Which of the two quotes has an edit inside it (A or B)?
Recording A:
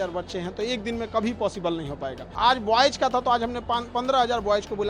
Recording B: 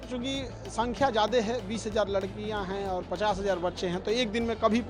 A